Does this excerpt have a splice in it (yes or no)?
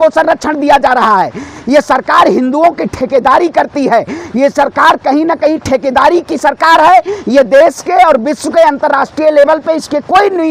no